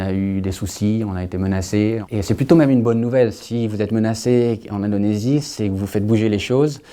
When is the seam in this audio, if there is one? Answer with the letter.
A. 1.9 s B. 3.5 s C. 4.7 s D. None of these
A